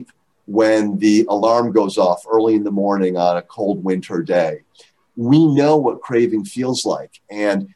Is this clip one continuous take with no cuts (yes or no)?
yes